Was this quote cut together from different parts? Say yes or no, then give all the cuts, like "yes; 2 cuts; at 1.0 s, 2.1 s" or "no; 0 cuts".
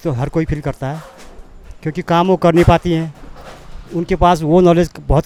no; 0 cuts